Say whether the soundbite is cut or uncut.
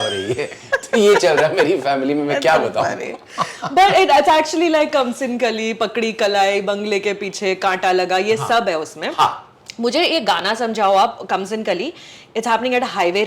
uncut